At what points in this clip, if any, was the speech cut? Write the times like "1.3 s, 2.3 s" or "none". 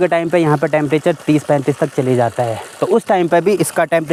none